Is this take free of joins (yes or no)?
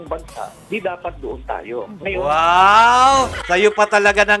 no